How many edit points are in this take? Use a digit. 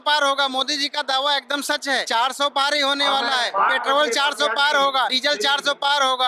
3